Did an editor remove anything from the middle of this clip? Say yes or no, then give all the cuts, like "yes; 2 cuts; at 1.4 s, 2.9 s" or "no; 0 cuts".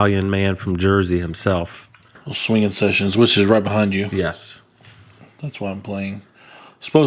yes; 1 cut; at 2.3 s